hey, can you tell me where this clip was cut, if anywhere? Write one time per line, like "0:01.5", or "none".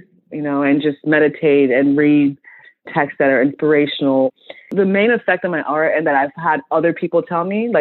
0:02.9
0:04.3